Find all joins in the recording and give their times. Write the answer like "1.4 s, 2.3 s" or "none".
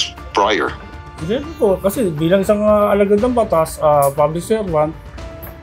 1.0 s